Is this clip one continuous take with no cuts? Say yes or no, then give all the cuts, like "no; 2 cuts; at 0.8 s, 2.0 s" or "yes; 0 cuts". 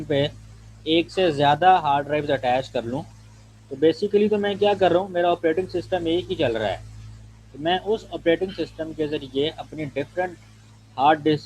yes; 0 cuts